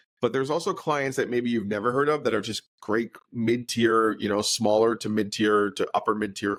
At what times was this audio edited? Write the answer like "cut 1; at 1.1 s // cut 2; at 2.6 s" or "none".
none